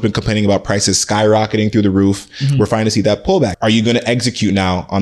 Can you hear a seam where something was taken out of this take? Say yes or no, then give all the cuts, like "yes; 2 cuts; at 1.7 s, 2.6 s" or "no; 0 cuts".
yes; 1 cut; at 3.6 s